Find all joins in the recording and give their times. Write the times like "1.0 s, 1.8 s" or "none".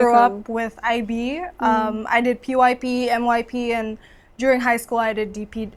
none